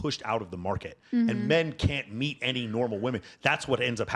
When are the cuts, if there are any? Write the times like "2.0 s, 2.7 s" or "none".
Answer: none